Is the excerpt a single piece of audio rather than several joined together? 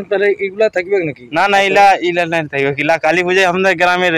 yes; 0 cuts

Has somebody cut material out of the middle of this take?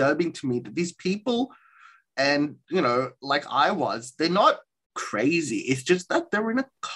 yes; 1 cut; at 5.0 s

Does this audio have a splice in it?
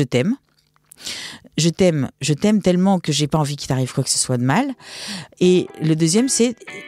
no; 0 cuts

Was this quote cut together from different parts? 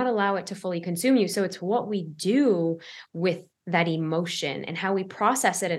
no; 0 cuts

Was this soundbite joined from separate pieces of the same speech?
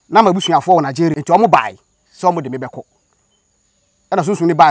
yes; 1 cut; at 1.2 s

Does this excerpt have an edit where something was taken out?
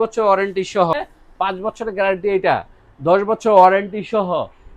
yes; 1 cut; at 0.9 s

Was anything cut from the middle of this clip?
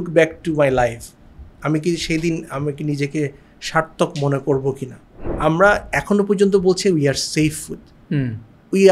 yes; 1 cut; at 5.1 s

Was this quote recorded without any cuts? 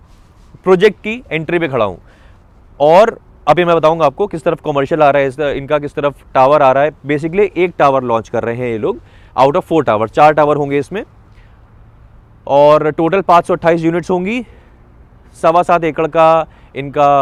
yes; 0 cuts

